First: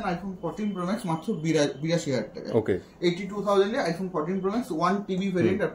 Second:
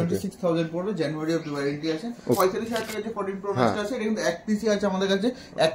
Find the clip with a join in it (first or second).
second